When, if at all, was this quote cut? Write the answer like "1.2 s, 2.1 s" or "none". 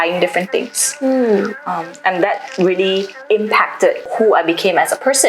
3.1 s, 4.1 s